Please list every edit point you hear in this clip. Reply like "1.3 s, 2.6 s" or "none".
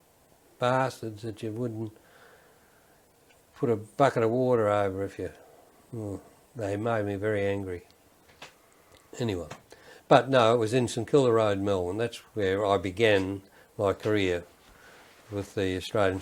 none

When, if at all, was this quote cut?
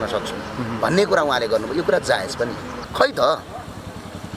2.8 s

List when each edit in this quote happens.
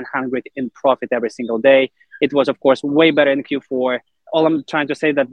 4.1 s

